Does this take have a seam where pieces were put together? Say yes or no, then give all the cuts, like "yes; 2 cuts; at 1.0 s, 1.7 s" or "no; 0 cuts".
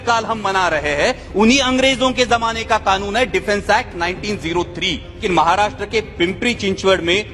yes; 1 cut; at 5.2 s